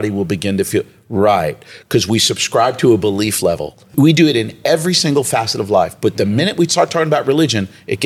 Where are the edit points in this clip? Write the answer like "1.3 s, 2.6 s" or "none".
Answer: 3.9 s